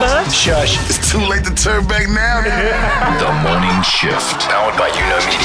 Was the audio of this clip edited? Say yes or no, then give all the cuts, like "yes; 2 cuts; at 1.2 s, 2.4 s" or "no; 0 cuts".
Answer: no; 0 cuts